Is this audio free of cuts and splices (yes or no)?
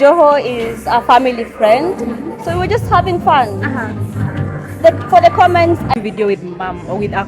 no